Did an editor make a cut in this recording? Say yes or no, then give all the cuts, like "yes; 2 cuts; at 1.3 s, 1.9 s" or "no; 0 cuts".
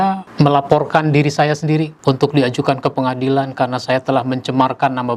no; 0 cuts